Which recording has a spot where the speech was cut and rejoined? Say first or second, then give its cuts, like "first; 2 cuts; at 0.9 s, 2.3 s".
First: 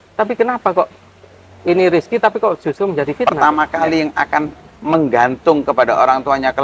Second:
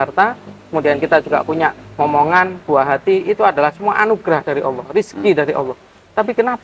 first; 1 cut; at 3.2 s